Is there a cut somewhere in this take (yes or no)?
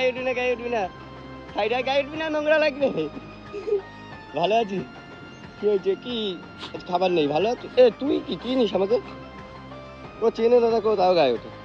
no